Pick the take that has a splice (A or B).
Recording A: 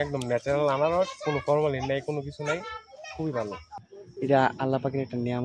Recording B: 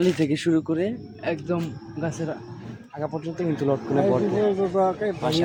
A